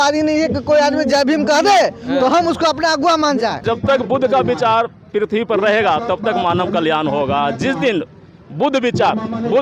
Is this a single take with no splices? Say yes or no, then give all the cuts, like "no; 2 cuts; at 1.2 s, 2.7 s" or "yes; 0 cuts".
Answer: no; 1 cut; at 3.6 s